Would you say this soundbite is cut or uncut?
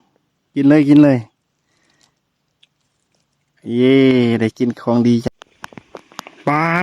cut